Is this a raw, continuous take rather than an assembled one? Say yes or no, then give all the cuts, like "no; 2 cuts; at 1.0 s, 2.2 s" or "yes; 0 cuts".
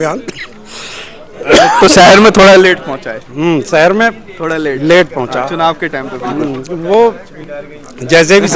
yes; 0 cuts